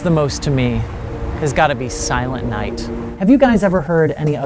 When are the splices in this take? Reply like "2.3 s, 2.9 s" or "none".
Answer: 3.0 s